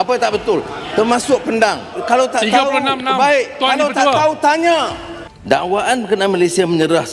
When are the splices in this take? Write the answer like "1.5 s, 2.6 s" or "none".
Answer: 5.7 s